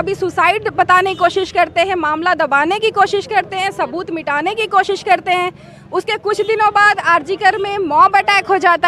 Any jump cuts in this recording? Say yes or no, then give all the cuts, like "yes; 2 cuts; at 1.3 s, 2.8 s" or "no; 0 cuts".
no; 0 cuts